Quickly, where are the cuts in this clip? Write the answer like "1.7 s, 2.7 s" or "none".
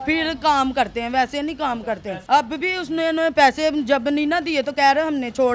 2.2 s